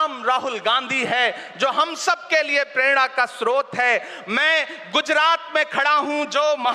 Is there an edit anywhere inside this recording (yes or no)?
no